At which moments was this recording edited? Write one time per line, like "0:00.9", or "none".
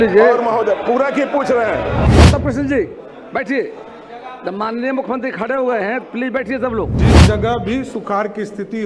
0:02.1
0:07.0

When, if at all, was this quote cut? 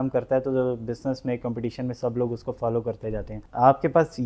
0:03.4

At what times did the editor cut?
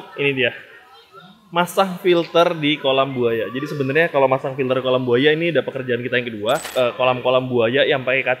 0:06.7

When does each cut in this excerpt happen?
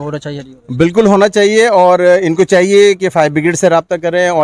none

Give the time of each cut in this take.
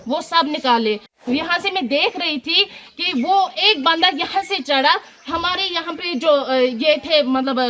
0:01.1

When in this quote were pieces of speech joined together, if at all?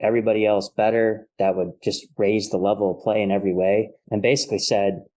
0:04.0

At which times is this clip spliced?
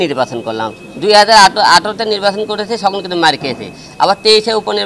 none

